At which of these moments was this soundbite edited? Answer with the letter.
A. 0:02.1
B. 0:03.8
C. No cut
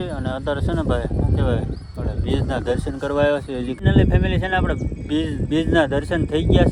B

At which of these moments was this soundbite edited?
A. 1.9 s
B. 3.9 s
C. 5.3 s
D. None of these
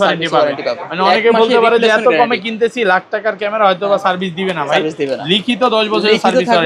D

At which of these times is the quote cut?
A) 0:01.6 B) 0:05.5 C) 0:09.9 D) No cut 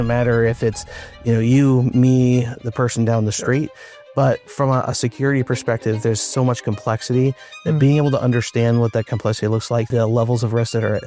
C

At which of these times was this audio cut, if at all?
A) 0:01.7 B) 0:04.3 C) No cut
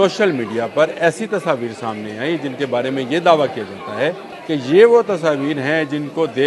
B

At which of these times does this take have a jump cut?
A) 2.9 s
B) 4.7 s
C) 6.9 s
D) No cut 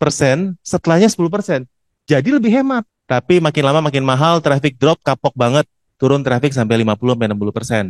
A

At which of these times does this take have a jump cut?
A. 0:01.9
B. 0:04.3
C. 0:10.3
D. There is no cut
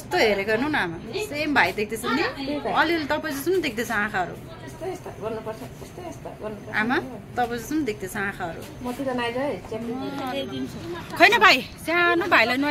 C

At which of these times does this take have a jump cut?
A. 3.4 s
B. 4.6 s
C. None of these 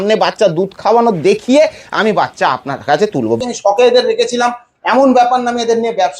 A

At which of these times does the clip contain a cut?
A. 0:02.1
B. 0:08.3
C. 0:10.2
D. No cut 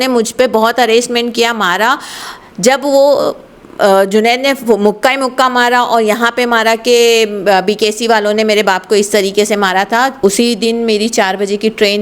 C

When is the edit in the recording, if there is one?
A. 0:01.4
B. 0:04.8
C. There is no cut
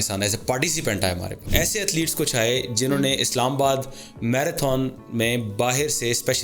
A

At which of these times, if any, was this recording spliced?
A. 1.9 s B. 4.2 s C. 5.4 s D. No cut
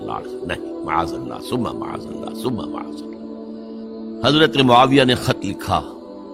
B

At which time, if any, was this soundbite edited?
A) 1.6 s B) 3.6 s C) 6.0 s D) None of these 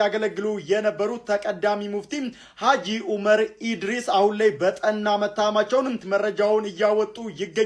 C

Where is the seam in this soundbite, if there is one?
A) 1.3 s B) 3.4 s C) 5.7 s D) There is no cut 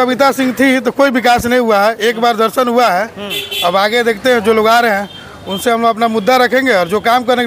D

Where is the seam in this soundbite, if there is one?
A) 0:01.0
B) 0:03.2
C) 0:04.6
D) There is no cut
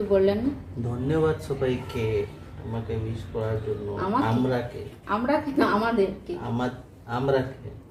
D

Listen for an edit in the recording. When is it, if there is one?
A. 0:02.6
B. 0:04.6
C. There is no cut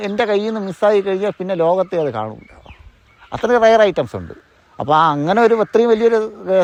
C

